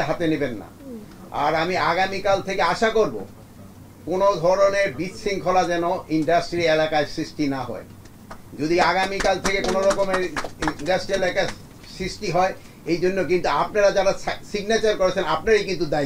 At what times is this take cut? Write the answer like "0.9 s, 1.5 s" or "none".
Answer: none